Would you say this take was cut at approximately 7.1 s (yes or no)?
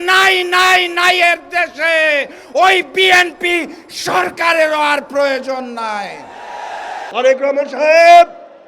yes